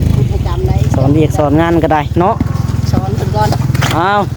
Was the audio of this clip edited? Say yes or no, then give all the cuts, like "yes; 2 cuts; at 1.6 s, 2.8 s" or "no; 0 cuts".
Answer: no; 0 cuts